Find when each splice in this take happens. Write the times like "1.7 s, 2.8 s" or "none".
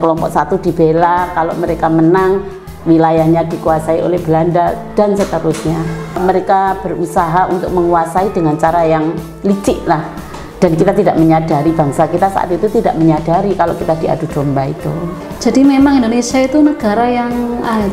6.2 s, 15.2 s

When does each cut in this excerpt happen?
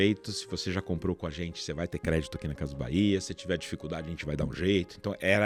none

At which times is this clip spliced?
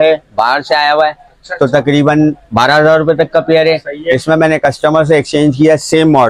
none

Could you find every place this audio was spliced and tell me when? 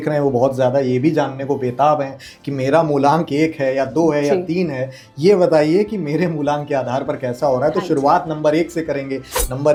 none

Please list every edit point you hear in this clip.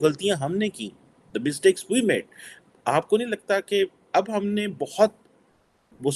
none

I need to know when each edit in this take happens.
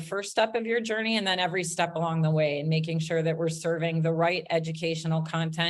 none

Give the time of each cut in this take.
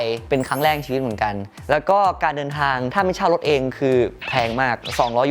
1.6 s

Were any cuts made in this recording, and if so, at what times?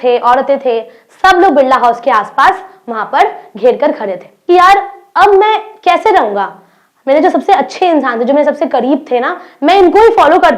4.3 s

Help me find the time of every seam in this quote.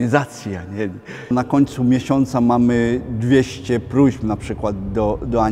1.3 s

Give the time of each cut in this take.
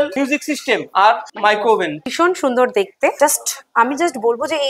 2.1 s, 3.2 s

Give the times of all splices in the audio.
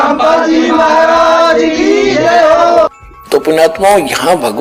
2.9 s

